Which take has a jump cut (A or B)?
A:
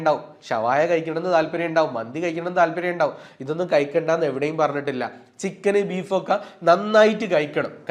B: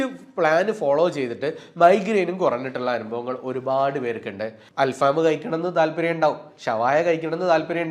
B